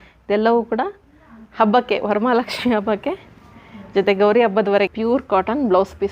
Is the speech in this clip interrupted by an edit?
yes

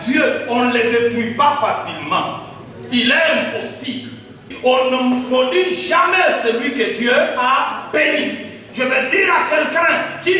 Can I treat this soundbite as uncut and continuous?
no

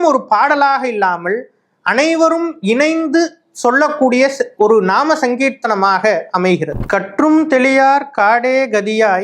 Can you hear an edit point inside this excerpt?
yes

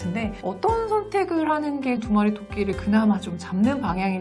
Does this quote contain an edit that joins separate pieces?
yes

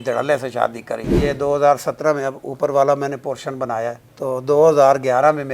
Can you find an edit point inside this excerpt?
yes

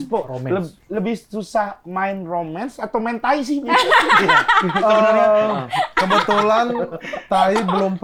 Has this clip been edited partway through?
no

